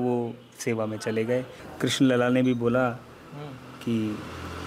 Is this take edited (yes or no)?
yes